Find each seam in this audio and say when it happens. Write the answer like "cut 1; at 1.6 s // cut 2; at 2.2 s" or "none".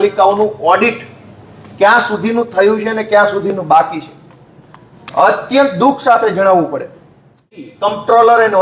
cut 1; at 7.7 s